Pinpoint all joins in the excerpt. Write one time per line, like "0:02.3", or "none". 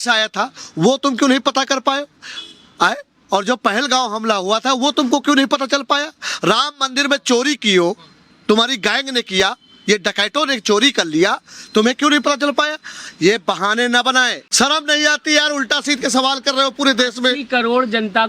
0:14.4